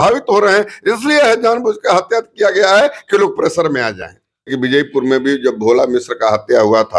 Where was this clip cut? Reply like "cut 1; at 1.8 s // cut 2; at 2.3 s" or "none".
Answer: cut 1; at 4.5 s